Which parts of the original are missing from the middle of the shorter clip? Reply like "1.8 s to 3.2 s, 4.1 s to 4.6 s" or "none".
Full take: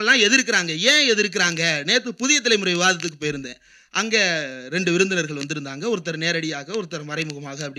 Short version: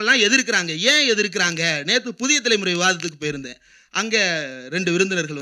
none